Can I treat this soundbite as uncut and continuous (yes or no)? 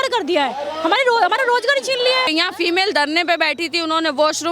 no